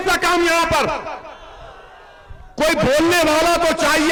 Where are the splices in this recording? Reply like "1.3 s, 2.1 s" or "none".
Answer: none